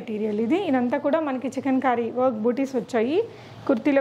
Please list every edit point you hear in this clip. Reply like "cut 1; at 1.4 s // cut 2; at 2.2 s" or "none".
none